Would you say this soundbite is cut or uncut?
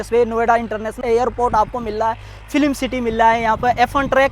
cut